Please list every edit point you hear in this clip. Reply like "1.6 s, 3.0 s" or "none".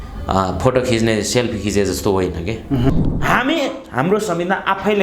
2.9 s

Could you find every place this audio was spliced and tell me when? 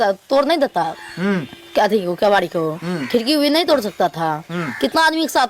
none

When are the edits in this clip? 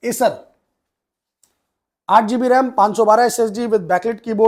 none

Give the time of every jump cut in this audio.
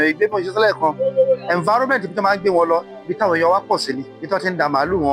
4.1 s

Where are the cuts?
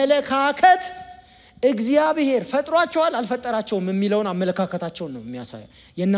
none

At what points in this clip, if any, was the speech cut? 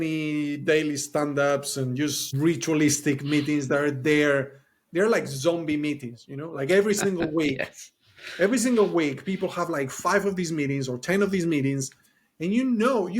2.2 s

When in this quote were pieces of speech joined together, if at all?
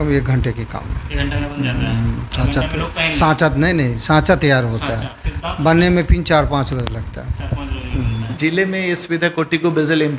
8.3 s

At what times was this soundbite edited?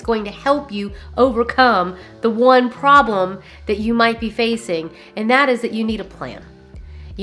none

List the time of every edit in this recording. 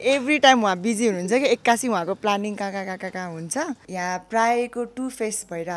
3.8 s

